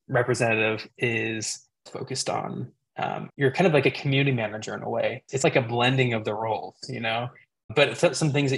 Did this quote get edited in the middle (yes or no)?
yes